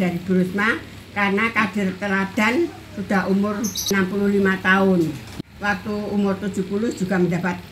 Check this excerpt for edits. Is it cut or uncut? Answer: cut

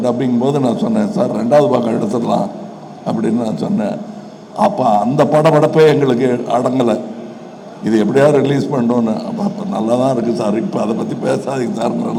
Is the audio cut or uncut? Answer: uncut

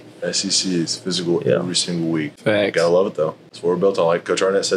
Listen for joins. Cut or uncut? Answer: cut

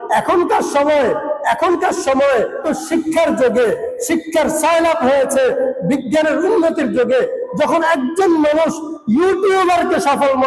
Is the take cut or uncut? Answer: cut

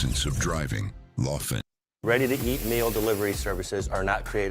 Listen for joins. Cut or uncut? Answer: cut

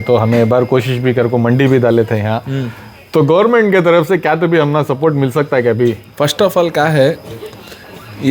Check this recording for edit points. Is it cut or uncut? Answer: uncut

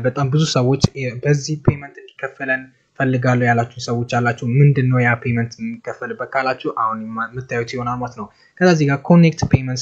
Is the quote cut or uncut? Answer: uncut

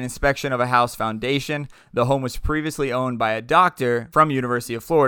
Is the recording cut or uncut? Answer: cut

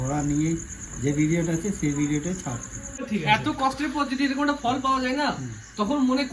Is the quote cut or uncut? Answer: cut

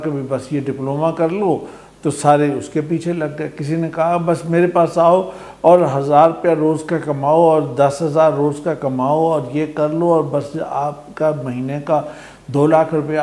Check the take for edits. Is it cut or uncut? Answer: uncut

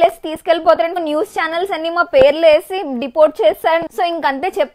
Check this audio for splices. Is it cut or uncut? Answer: cut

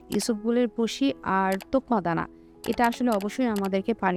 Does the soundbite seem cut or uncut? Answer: uncut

